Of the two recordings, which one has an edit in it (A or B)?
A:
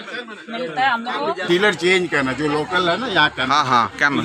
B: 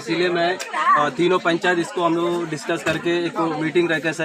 A